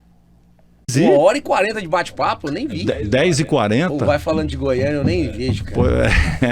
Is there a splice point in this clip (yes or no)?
yes